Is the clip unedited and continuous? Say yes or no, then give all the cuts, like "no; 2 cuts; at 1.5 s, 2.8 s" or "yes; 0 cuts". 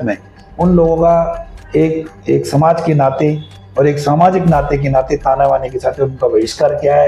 yes; 0 cuts